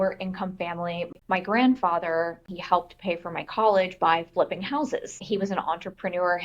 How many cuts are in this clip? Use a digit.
2